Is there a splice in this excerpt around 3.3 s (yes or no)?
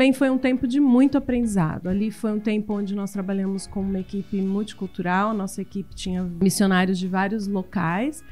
no